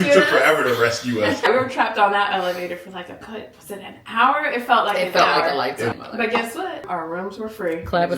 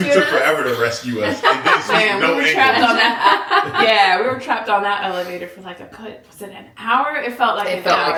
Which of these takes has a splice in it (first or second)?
first